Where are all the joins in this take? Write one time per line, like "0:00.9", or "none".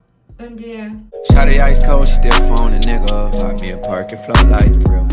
0:01.1